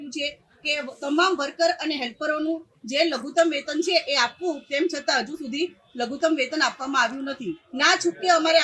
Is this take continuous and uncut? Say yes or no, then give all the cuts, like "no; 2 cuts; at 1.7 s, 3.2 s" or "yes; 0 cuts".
no; 1 cut; at 7.6 s